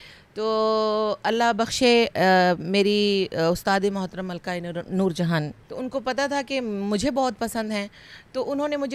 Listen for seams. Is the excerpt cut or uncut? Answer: cut